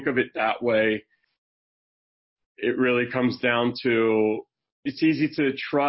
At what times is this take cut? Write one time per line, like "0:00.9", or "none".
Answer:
0:04.9